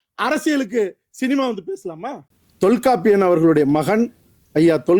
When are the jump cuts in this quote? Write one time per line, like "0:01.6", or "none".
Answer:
0:02.3